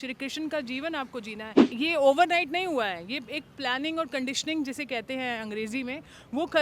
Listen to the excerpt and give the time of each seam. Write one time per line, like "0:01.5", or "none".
0:01.6